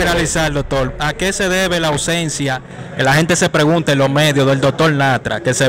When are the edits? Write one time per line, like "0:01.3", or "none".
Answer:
none